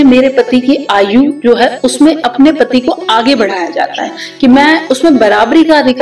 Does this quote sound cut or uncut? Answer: uncut